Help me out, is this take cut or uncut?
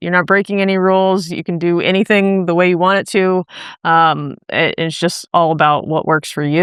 uncut